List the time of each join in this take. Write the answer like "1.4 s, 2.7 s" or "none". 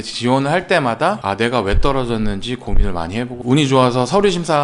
3.4 s